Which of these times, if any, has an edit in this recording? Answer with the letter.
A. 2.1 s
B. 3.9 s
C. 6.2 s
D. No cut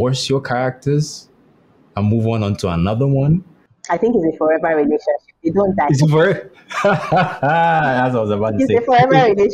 B